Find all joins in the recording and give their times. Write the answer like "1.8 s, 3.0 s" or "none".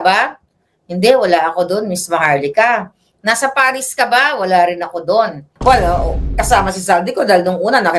5.4 s